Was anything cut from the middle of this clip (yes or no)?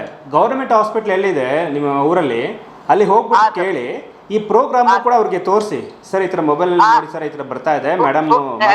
no